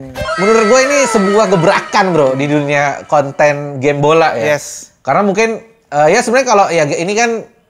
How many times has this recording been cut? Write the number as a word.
zero